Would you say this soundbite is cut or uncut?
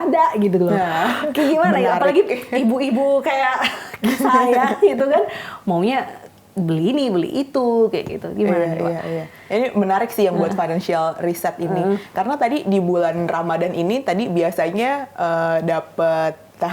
uncut